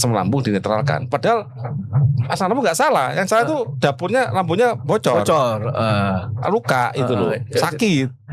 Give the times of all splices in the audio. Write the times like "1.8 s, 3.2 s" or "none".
none